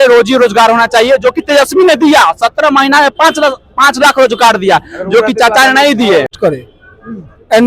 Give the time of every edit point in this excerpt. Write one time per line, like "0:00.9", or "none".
0:06.3